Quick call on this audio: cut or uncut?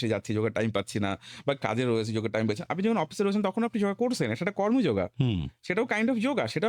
uncut